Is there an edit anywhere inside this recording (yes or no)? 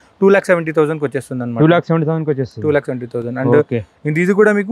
no